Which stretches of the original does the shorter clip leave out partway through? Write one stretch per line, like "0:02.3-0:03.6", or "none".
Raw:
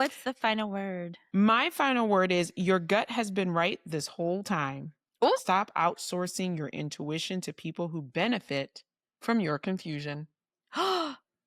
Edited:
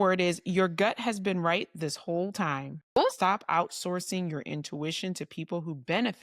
0:04.9-0:05.1